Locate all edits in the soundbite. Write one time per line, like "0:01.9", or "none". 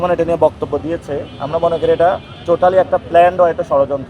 0:02.3